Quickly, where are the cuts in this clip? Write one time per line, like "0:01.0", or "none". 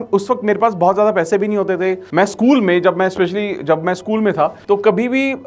0:02.0
0:04.6